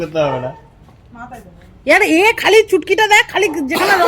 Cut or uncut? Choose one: uncut